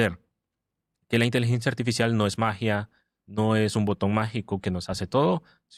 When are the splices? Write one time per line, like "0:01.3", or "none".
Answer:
none